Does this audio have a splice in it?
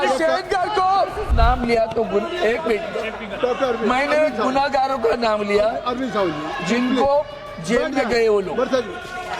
yes; 1 cut; at 1.3 s

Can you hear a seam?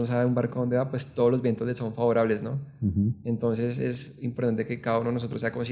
no; 0 cuts

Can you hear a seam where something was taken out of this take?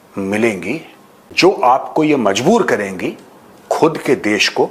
no; 0 cuts

